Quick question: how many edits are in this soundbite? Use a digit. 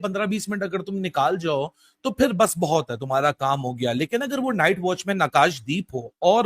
0